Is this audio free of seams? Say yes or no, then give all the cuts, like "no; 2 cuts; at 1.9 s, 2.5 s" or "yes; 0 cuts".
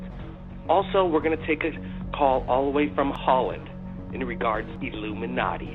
no; 1 cut; at 2.4 s